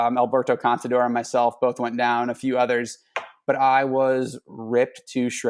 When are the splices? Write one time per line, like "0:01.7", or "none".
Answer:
none